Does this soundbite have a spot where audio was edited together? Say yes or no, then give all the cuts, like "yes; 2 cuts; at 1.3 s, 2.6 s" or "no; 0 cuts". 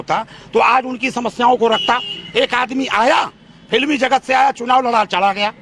no; 0 cuts